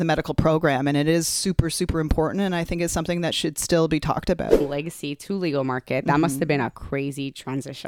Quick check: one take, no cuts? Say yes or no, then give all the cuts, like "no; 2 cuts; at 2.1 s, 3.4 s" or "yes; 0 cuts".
no; 1 cut; at 4.6 s